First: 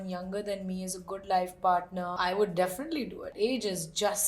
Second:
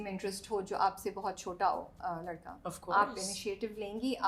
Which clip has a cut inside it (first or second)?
first